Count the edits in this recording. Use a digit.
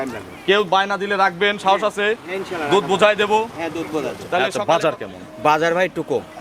1